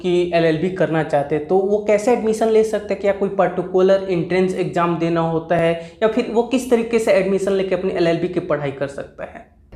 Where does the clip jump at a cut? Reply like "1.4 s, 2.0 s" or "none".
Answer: none